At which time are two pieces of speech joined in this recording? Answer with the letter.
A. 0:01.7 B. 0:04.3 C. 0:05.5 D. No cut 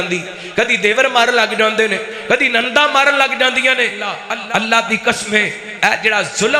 B